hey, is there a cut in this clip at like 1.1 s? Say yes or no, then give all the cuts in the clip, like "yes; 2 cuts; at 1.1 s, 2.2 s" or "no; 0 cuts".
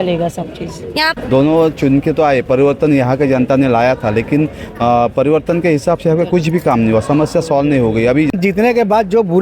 yes; 2 cuts; at 1.1 s, 8.3 s